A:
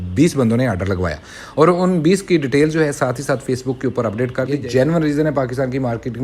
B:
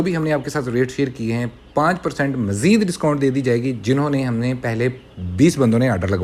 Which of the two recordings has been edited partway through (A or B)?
A